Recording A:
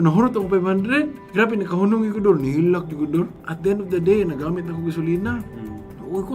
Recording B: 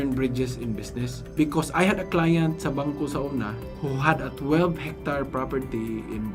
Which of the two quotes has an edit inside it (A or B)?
A